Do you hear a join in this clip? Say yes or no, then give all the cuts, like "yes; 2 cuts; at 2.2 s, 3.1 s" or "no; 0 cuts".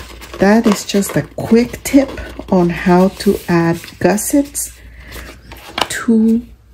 no; 0 cuts